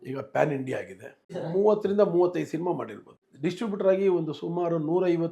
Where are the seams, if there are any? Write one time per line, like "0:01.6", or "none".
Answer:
0:01.3